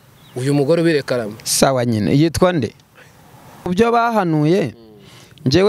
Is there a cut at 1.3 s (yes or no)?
no